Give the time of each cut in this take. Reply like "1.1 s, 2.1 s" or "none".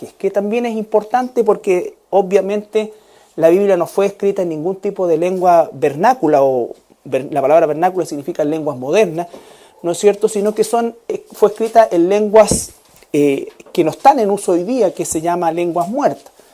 14.6 s

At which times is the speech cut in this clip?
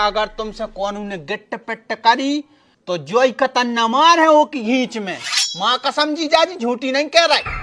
none

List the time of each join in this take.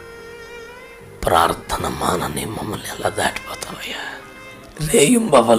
4.6 s

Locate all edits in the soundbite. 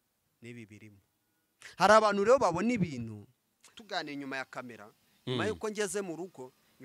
3.7 s

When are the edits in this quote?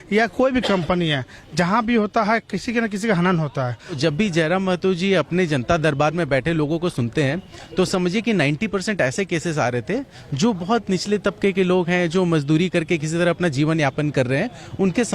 4.0 s

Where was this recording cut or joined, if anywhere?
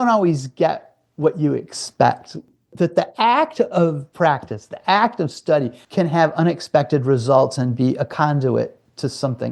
4.0 s, 5.8 s

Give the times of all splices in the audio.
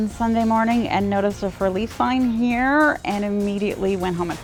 none

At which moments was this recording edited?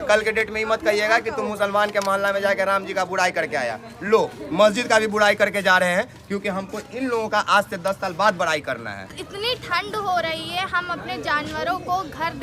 9.2 s

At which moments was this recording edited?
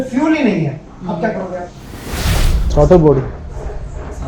2.2 s

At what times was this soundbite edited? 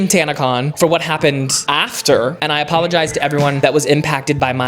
2.4 s

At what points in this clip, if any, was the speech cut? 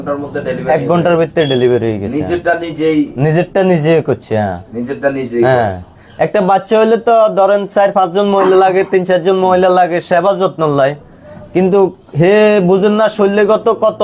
none

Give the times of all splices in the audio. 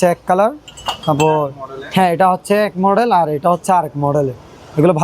none

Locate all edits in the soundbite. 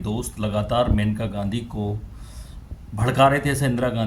none

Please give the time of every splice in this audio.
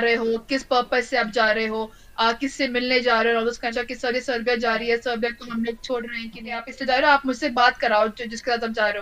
3.6 s, 6.7 s

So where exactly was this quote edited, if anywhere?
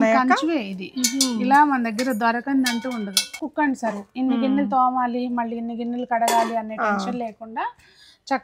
3.4 s

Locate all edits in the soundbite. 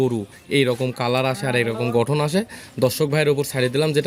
none

